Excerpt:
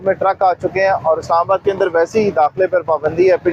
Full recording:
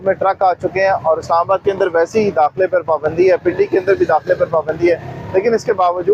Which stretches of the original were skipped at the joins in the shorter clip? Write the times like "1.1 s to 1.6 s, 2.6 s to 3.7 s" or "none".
none

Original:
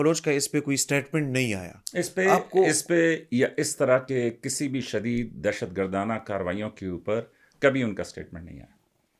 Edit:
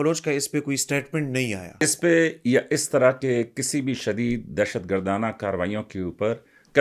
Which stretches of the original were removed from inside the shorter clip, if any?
1.8 s to 2.7 s

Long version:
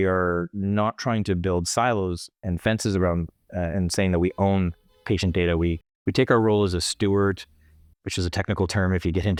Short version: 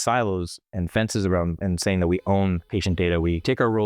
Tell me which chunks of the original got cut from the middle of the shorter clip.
3.3 s to 3.7 s, 5.1 s to 5.7 s

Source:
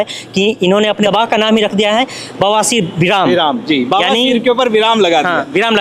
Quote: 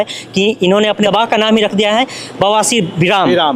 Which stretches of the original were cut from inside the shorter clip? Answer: none

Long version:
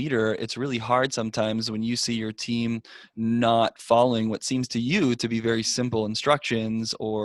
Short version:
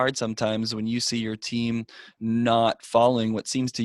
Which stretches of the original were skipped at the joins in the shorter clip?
none

